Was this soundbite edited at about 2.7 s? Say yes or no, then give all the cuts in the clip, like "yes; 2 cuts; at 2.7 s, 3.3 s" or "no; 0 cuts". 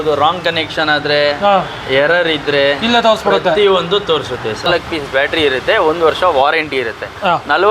no; 1 cut; at 4.6 s